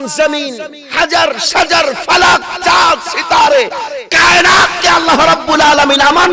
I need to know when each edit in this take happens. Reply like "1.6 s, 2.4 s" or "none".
none